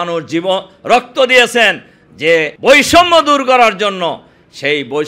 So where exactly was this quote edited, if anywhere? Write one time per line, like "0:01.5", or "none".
0:02.5